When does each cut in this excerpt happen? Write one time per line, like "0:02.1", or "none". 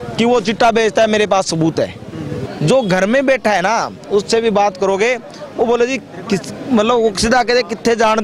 0:02.4

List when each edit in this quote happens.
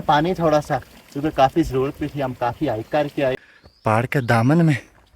0:03.4

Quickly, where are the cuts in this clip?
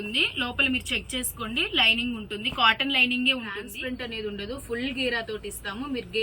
0:03.7

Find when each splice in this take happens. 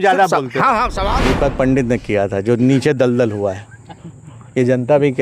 0:01.1

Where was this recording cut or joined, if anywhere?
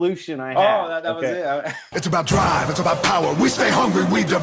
0:01.8

